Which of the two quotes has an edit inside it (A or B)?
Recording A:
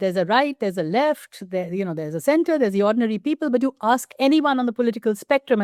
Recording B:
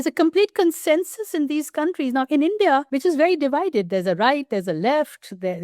B